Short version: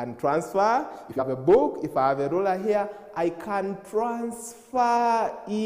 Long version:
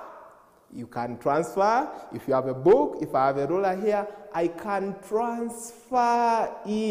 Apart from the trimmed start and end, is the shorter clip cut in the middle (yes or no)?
yes